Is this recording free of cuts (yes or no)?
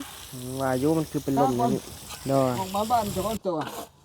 no